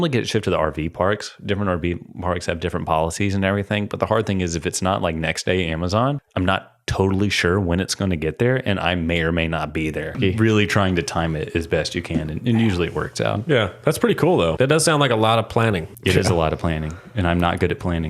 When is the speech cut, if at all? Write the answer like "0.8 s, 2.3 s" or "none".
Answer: 6.2 s, 10.1 s, 14.5 s, 15.9 s